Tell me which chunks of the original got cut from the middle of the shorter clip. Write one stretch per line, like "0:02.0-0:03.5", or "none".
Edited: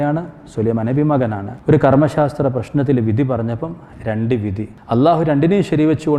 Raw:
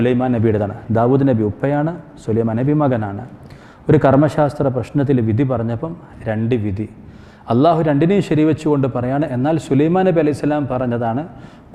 0:03.2-0:03.7
0:06.9-0:07.3